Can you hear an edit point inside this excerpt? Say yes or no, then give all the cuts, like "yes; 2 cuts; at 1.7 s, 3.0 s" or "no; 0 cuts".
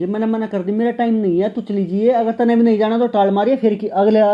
no; 0 cuts